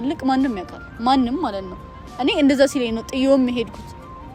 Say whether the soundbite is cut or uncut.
uncut